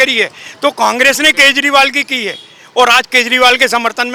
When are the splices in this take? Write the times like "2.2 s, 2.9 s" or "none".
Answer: none